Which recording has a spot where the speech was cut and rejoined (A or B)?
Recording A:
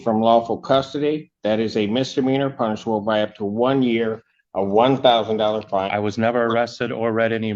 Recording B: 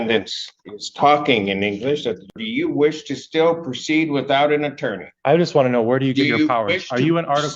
B